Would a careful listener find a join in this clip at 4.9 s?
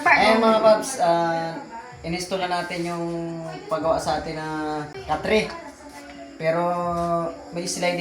yes; 1 cut; at 4.9 s

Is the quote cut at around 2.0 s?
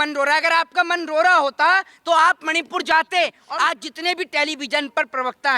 no; 1 cut; at 3.4 s

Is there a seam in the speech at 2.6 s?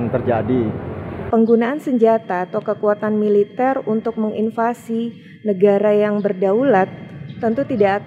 no; 1 cut; at 1.1 s

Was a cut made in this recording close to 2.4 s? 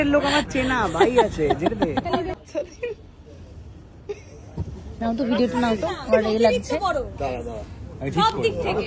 yes; 1 cut; at 2.4 s

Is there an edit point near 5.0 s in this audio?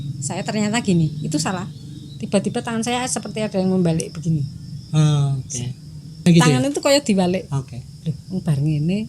no; 1 cut; at 6.3 s

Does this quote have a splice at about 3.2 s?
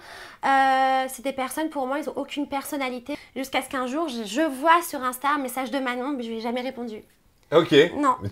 yes; 1 cut; at 3.2 s

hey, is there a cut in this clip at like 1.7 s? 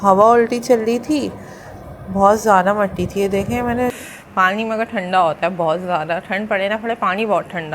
no; 1 cut; at 3.9 s

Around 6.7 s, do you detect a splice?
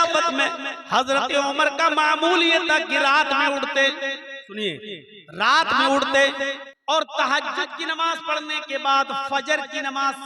yes; 1 cut; at 6.7 s

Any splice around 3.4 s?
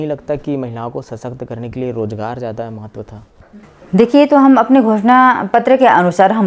yes; 1 cut; at 3.4 s

